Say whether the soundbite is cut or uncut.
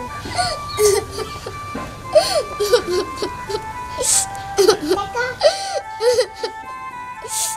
uncut